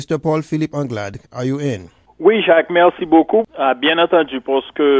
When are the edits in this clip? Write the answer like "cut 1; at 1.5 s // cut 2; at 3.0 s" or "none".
cut 1; at 1.2 s // cut 2; at 3.5 s